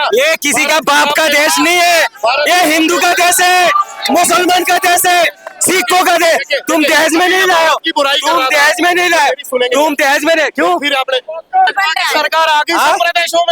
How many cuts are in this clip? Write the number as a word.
one